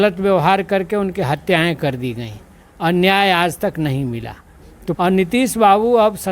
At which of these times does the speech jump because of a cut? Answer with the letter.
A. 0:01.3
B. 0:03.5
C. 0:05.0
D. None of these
C